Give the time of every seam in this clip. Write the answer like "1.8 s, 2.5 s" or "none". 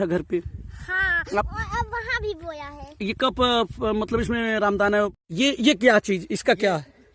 5.2 s